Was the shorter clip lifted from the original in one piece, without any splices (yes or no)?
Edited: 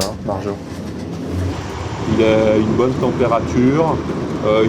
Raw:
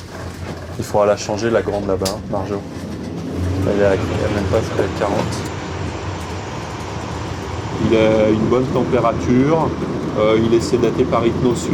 no